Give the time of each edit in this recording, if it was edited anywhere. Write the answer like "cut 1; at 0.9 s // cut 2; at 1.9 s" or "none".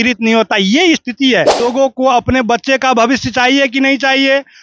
cut 1; at 1.7 s